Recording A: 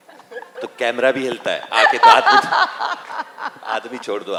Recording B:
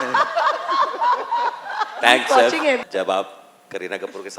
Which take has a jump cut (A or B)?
B